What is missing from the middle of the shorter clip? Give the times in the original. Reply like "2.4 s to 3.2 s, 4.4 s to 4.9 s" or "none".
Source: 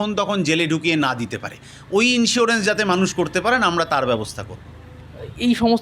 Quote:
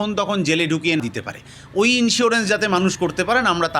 1.0 s to 1.2 s